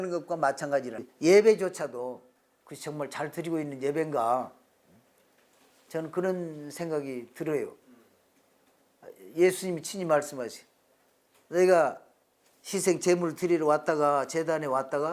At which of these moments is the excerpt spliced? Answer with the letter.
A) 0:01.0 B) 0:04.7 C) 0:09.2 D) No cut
A